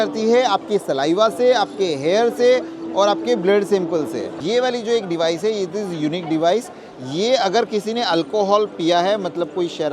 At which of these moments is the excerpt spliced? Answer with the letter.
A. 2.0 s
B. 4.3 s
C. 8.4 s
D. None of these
B